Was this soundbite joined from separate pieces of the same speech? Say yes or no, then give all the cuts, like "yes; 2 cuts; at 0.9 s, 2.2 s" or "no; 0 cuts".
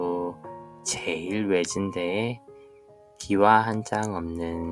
no; 0 cuts